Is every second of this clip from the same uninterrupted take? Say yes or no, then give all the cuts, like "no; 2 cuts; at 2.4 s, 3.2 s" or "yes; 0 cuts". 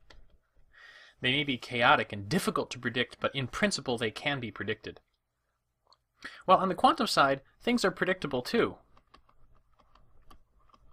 no; 1 cut; at 7.0 s